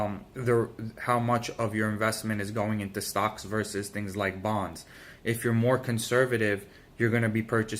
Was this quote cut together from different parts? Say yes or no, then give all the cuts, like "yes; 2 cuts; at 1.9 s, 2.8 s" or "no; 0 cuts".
yes; 1 cut; at 5.9 s